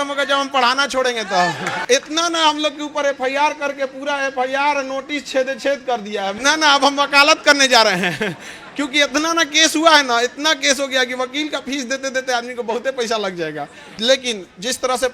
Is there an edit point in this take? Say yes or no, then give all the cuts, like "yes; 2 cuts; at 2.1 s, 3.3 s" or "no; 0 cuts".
yes; 3 cuts; at 1.7 s, 6.4 s, 13.8 s